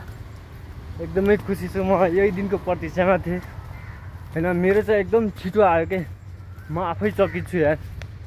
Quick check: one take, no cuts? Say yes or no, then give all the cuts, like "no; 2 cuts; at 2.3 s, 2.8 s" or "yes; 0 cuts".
yes; 0 cuts